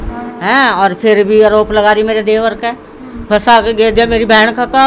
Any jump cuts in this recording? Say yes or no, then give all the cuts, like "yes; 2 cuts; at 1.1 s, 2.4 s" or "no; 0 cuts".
no; 0 cuts